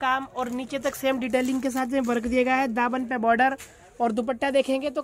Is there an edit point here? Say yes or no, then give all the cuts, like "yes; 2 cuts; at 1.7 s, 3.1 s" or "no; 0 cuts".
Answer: no; 0 cuts